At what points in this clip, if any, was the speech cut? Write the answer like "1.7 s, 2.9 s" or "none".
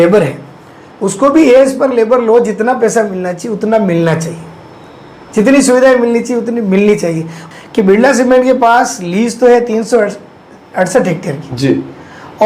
7.3 s